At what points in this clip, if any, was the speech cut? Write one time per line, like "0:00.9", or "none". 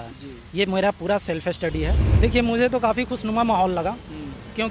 0:02.0